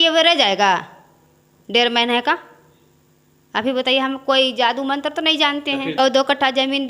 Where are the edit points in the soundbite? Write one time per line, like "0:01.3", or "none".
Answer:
0:06.0